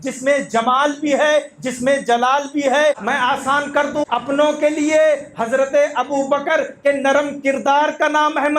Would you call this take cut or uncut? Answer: cut